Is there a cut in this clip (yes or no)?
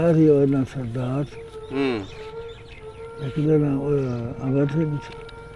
no